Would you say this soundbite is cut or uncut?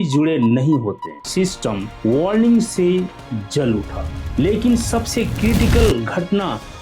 cut